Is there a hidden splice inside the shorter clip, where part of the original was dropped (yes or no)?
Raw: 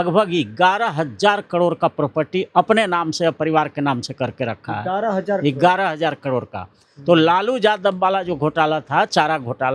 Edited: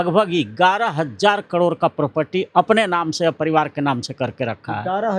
no